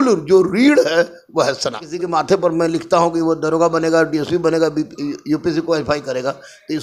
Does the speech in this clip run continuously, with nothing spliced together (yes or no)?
no